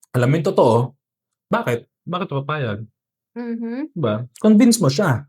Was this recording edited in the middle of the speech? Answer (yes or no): yes